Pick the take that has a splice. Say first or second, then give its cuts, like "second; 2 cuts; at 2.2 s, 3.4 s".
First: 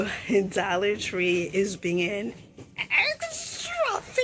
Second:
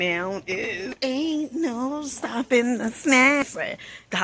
second; 2 cuts; at 0.9 s, 3.4 s